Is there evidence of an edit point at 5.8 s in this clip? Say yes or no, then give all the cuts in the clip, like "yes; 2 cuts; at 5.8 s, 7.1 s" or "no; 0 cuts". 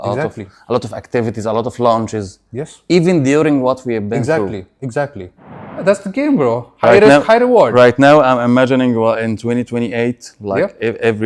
yes; 1 cut; at 5.8 s